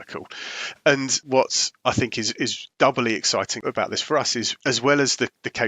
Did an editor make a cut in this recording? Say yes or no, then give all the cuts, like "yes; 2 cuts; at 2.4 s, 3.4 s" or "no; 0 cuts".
yes; 4 cuts; at 1.2 s, 2.6 s, 3.6 s, 4.5 s